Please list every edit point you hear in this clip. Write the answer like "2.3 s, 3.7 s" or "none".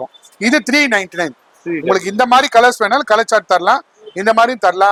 none

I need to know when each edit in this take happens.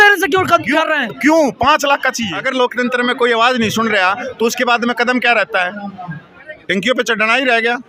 2.3 s

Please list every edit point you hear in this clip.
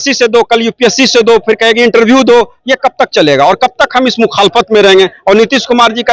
none

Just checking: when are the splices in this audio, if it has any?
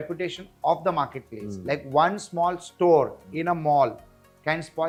none

